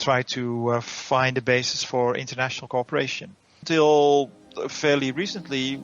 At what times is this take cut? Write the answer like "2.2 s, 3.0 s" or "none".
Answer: 3.6 s